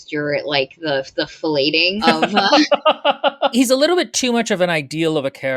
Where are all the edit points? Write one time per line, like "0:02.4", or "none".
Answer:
0:02.0
0:03.5